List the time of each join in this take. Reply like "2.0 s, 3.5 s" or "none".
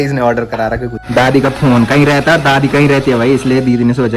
0.9 s